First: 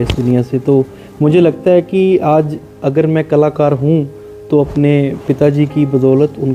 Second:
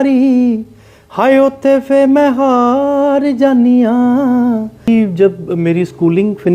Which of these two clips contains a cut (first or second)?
second